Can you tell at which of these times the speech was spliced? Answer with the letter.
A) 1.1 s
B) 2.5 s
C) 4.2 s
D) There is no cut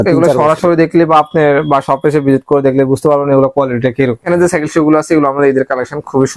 C